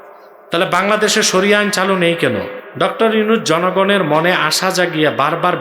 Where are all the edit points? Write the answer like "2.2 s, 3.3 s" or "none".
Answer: 2.6 s

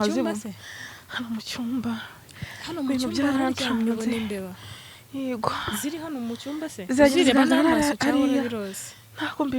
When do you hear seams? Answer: none

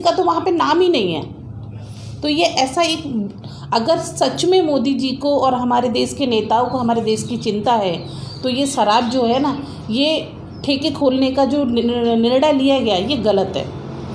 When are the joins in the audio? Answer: none

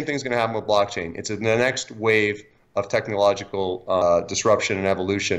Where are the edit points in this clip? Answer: 4.0 s

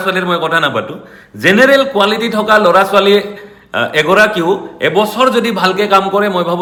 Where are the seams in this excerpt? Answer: none

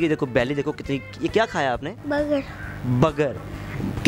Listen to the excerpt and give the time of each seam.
none

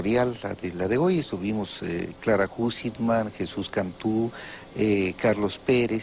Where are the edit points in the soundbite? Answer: 3.8 s

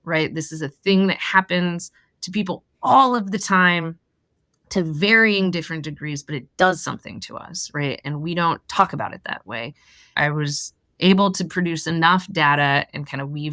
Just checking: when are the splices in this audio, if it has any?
10.2 s

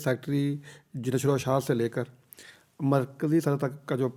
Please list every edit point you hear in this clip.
none

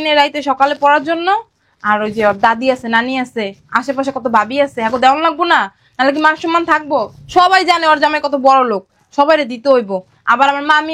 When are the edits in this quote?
none

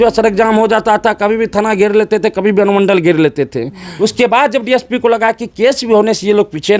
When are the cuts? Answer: 3.8 s

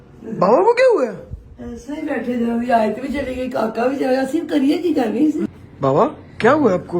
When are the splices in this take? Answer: 5.4 s

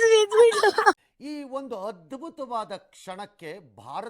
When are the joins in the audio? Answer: 0.9 s

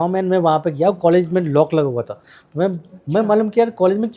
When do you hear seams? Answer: none

